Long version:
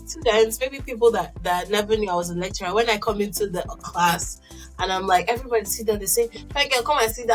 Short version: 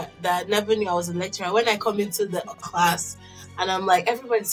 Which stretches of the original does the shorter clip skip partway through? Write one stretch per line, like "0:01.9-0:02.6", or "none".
none